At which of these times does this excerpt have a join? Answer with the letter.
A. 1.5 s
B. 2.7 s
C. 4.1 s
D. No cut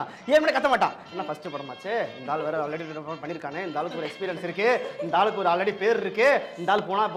D